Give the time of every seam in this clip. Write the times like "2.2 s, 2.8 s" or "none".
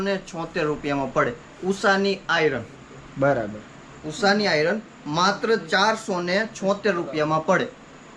none